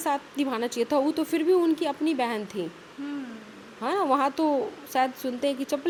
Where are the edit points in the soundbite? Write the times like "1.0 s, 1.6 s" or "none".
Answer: none